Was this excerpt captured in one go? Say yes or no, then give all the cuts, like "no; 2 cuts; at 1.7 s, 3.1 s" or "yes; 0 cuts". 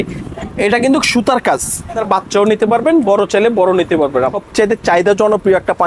no; 2 cuts; at 2.0 s, 4.4 s